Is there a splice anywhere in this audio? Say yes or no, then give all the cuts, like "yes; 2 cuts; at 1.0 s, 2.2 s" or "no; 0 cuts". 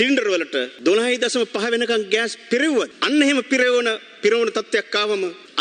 no; 0 cuts